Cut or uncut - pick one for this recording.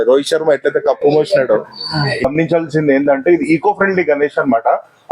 cut